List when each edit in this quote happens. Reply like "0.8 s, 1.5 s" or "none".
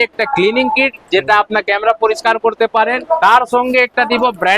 3.2 s